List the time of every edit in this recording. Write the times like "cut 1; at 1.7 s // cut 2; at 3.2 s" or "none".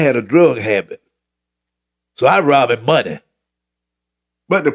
none